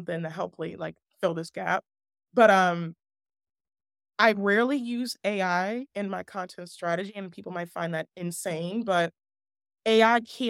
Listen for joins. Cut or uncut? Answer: uncut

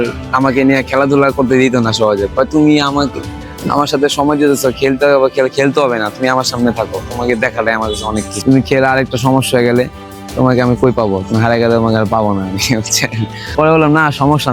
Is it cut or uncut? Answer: uncut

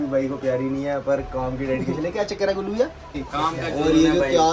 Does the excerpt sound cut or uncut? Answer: cut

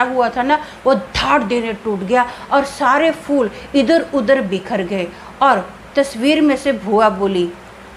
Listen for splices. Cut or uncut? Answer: uncut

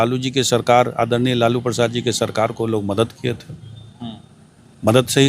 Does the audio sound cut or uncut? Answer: uncut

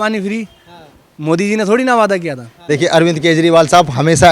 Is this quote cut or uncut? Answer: cut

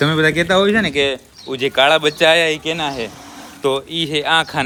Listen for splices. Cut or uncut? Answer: uncut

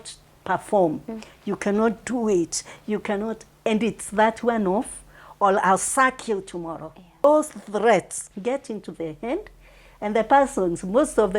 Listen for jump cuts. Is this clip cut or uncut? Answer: cut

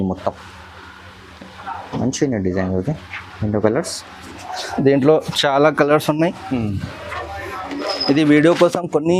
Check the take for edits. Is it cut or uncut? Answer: uncut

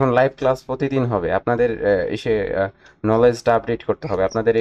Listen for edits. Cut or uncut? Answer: uncut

